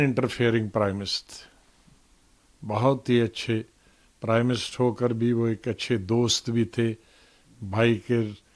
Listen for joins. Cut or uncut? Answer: uncut